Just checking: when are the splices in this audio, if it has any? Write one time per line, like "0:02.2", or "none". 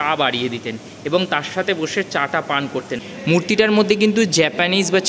0:03.0